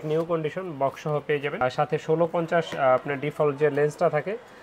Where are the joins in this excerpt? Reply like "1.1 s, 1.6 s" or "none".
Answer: none